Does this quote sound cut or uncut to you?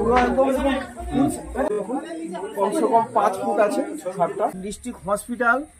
cut